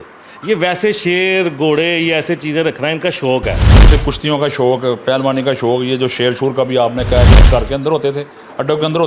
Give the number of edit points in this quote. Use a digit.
2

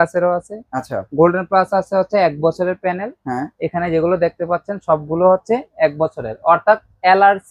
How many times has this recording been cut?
0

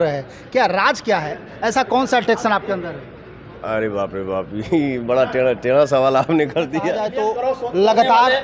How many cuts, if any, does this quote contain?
1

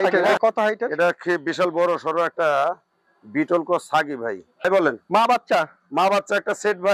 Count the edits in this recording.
1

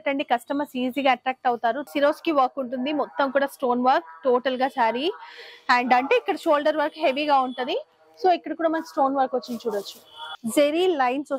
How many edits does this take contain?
2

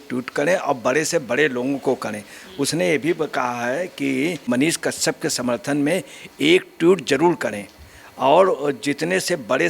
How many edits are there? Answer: 1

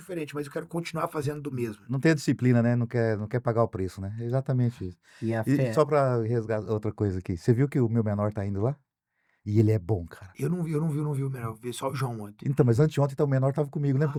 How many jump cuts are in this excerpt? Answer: 0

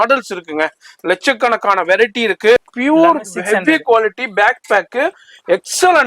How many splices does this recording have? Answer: 1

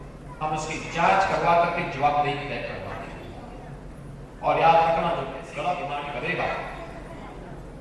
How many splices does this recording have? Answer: 1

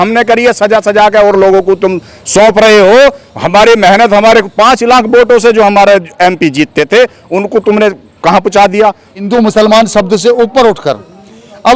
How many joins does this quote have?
1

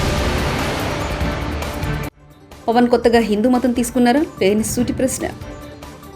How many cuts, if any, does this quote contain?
0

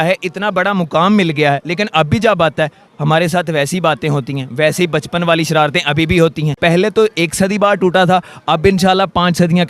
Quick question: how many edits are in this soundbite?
1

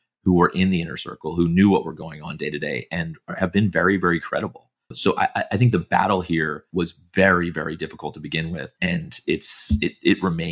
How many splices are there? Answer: 0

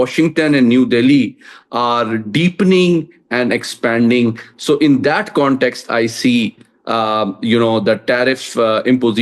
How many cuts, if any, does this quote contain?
0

